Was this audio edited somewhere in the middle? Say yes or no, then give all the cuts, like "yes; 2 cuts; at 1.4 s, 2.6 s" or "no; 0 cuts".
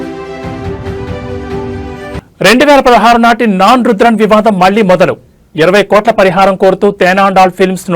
no; 0 cuts